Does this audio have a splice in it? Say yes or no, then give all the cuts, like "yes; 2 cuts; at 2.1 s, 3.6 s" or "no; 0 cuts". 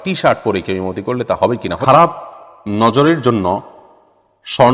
yes; 1 cut; at 1.8 s